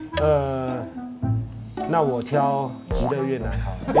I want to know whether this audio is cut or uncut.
uncut